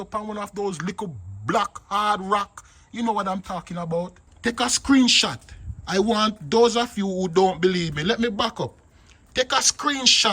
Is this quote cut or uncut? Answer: cut